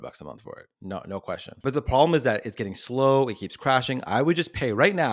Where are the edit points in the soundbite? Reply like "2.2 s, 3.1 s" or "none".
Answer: 1.4 s

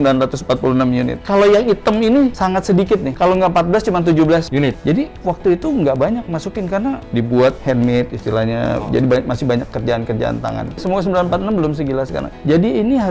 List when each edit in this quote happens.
1.2 s, 4.8 s, 7.1 s, 10.8 s

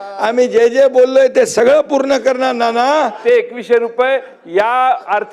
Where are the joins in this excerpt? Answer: 3.2 s

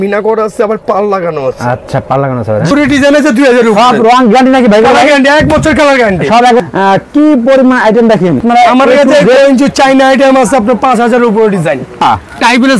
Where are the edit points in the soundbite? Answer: 2.7 s, 6.6 s, 8.4 s, 12.0 s

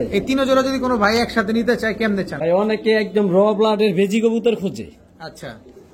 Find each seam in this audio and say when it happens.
2.3 s

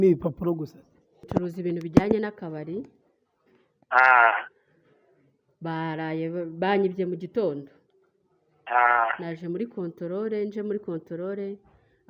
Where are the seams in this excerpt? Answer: 1.3 s

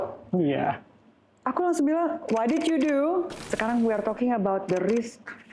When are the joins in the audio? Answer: 3.4 s

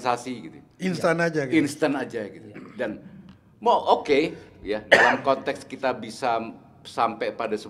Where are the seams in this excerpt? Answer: none

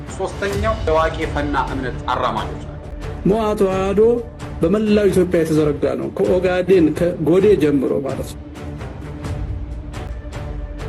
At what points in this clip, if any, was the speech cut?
2.9 s, 10.1 s

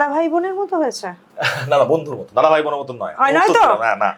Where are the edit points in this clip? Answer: none

